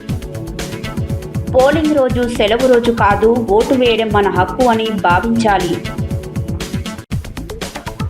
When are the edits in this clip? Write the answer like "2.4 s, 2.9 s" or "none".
none